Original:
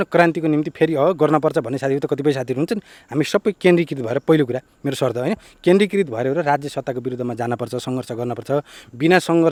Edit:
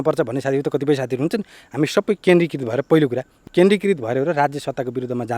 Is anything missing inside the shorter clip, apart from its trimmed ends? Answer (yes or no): yes